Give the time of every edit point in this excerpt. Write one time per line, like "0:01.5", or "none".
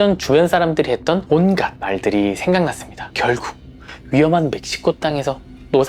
0:01.5

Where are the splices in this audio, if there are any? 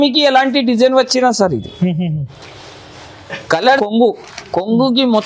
0:03.6

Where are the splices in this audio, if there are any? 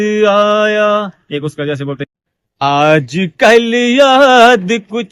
none

